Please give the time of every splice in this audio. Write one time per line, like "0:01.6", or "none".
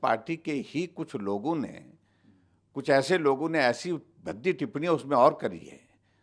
none